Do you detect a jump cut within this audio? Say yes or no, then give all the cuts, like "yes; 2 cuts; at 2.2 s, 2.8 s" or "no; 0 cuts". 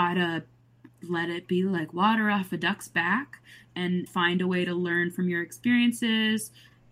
yes; 1 cut; at 4.1 s